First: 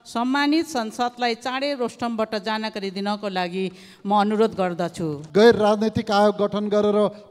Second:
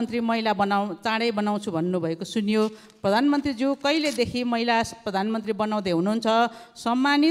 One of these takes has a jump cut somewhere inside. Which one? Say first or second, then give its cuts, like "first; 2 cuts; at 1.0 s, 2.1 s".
first; 1 cut; at 5.2 s